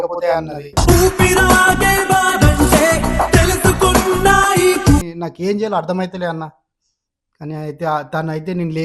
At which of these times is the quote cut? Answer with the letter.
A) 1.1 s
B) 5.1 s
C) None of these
B